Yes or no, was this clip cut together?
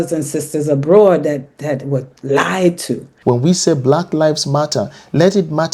yes